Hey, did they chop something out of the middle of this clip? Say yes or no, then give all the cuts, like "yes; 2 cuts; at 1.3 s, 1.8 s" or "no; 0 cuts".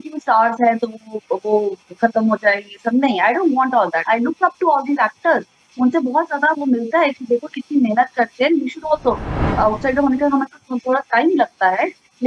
yes; 2 cuts; at 4.0 s, 9.4 s